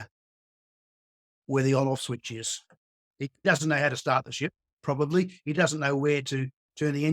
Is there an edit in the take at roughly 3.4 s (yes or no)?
yes